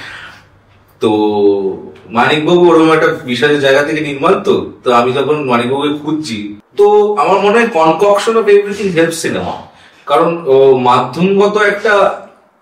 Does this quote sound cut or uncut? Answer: cut